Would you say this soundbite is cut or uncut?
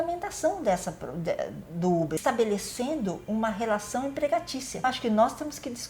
cut